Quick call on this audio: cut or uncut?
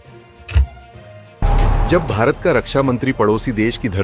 cut